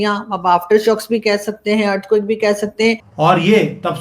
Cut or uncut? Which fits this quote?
cut